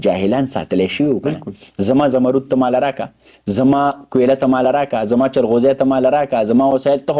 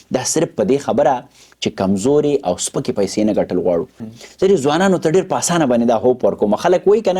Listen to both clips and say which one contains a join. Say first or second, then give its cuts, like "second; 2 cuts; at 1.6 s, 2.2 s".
second; 1 cut; at 4.1 s